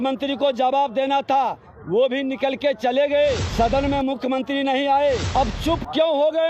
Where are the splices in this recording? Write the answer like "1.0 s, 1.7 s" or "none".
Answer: 3.5 s, 5.3 s